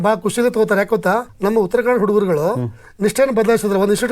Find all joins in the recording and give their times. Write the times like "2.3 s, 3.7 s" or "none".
1.3 s